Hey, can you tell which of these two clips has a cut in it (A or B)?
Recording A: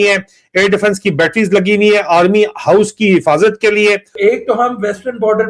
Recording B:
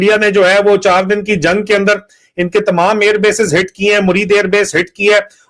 A